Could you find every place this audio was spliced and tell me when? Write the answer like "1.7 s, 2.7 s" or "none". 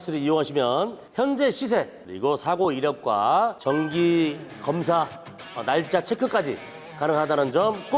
2.0 s, 3.6 s